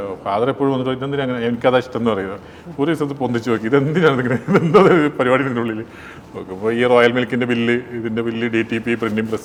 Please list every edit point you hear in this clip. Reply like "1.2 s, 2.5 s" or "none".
none